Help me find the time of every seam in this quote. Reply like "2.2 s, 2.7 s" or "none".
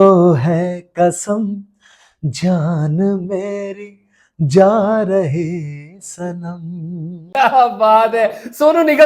7.2 s